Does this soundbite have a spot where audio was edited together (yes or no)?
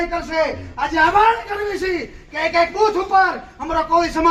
no